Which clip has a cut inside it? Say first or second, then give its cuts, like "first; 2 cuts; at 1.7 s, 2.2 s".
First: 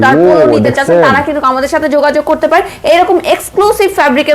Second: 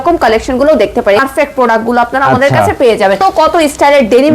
second; 2 cuts; at 1.2 s, 3.2 s